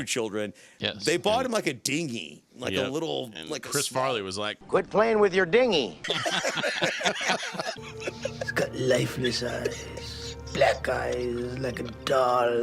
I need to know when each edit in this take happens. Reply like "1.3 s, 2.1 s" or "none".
6.0 s, 7.8 s